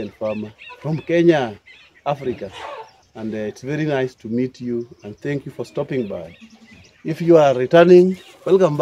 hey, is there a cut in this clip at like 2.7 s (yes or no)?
no